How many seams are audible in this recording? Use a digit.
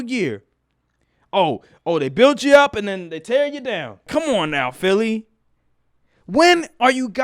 1